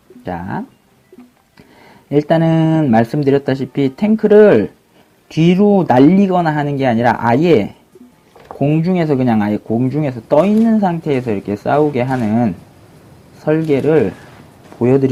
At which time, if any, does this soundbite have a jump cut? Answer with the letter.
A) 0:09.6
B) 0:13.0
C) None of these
C